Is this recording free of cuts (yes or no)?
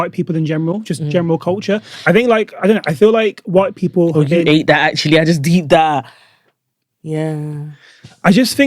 yes